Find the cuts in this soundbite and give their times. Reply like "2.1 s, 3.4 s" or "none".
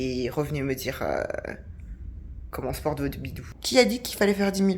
3.6 s